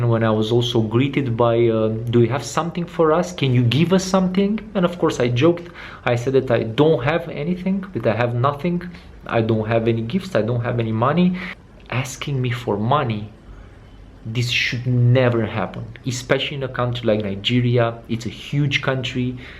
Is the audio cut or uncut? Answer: cut